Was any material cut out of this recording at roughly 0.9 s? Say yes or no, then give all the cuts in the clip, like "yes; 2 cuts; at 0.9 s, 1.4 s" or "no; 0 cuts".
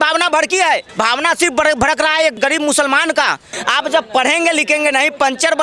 yes; 3 cuts; at 0.9 s, 2.3 s, 3.5 s